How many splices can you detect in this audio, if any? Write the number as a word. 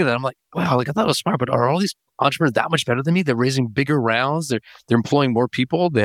zero